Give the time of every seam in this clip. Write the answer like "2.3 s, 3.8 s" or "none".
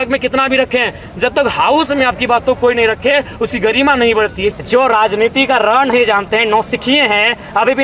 4.5 s